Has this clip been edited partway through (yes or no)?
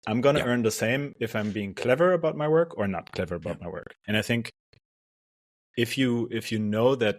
yes